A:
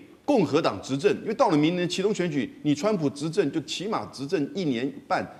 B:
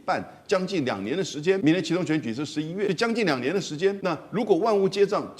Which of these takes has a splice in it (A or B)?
B